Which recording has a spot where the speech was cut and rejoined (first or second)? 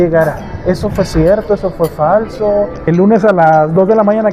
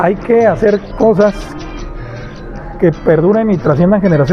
first